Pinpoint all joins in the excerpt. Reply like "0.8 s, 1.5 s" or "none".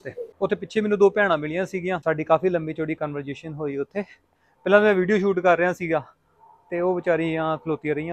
2.0 s

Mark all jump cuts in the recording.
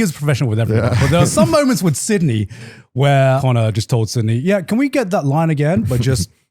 3.4 s

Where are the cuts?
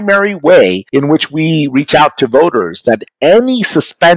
0.8 s, 3.1 s

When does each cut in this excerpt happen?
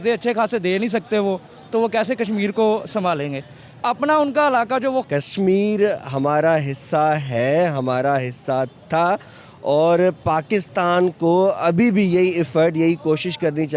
5.0 s

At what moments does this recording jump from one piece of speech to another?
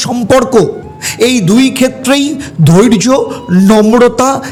none

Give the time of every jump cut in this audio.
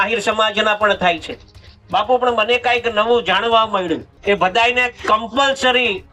4.1 s

